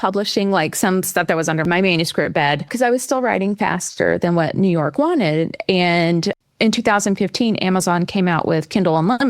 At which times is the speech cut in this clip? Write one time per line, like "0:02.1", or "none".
0:01.6
0:02.7
0:06.4